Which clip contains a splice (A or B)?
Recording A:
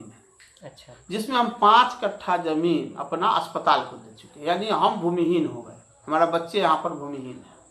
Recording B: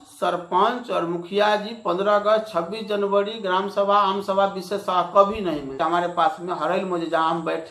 B